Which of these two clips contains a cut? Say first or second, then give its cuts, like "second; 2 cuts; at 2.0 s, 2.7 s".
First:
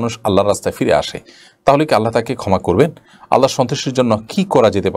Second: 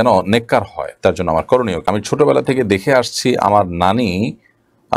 second; 1 cut; at 1.8 s